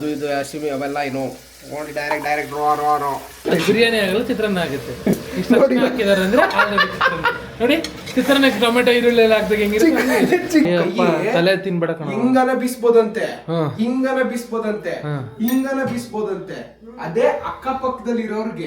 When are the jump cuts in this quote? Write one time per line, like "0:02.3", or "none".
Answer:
0:03.4
0:10.7

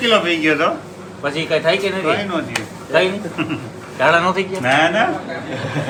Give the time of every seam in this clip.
none

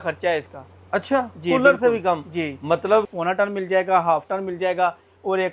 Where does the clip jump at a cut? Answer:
0:03.1

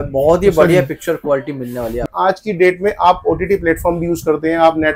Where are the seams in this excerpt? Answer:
0:02.0

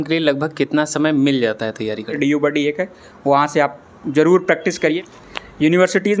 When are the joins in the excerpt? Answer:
0:02.1
0:04.9

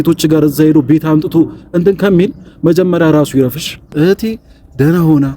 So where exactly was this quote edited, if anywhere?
0:03.9

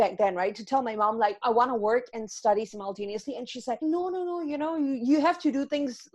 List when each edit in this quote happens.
0:01.4
0:03.8

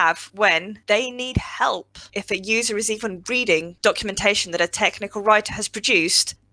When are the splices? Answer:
0:02.1

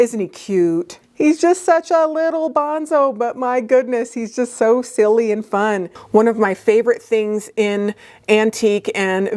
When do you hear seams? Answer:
0:01.0
0:05.9

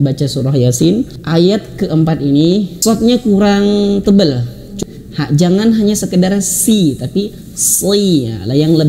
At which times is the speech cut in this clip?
0:01.2
0:02.7
0:04.6

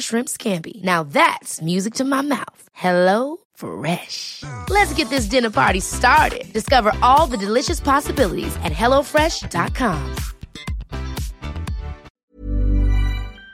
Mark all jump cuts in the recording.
0:12.1

